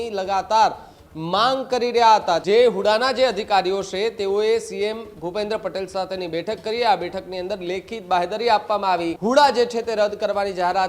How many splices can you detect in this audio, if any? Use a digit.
2